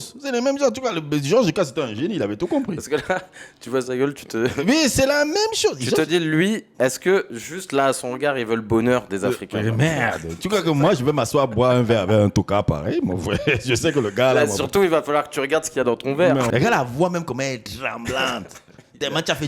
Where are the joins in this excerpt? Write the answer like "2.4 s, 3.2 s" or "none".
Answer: 16.5 s

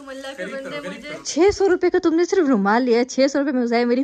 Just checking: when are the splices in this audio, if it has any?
1.3 s

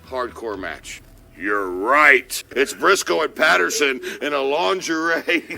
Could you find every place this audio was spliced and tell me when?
2.4 s

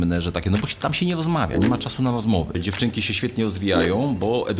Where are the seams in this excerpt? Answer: 2.6 s

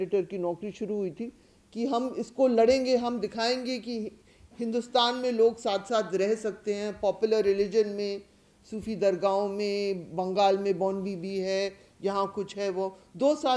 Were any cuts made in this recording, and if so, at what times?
none

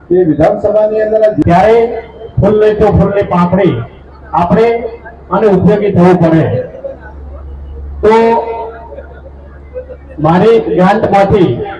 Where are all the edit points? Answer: 1.4 s

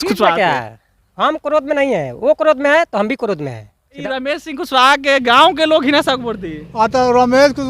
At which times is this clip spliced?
3.9 s

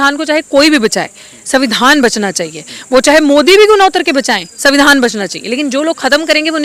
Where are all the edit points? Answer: none

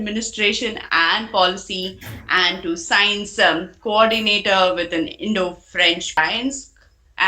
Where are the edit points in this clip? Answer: 6.2 s

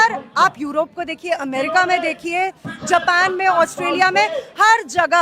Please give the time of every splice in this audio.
none

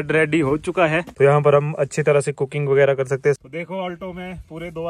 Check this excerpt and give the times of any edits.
1.1 s, 3.4 s

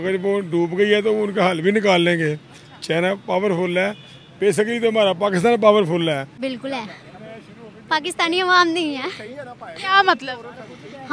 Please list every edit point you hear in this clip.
6.4 s

